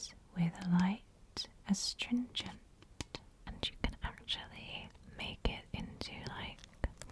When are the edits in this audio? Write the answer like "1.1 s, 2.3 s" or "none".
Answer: 3.5 s